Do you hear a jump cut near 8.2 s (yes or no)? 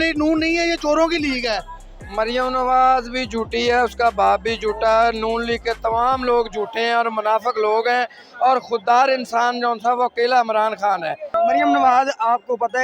no